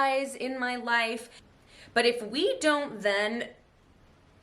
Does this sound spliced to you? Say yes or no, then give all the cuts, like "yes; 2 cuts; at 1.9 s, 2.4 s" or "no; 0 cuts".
yes; 1 cut; at 1.4 s